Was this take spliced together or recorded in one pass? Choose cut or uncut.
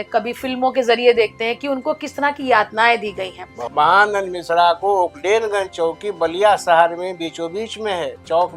cut